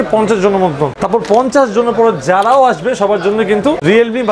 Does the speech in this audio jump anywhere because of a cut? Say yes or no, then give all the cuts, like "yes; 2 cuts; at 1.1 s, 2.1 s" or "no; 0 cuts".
yes; 1 cut; at 1.0 s